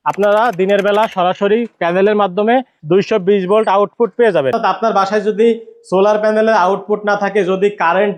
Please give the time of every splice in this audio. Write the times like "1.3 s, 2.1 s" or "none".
2.7 s, 4.6 s